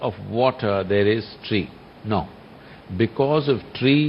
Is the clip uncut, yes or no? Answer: yes